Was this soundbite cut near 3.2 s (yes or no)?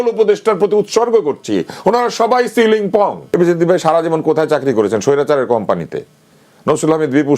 yes